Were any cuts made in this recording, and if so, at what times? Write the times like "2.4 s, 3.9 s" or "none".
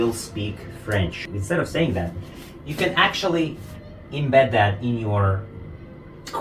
1.2 s